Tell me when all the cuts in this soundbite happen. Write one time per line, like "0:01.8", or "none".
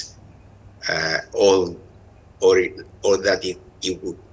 none